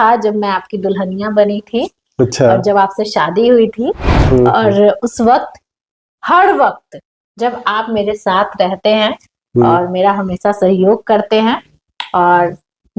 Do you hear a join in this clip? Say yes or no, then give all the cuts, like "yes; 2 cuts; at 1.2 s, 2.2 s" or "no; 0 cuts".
no; 0 cuts